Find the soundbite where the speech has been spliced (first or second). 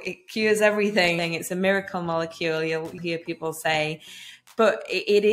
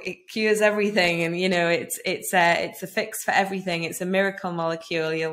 first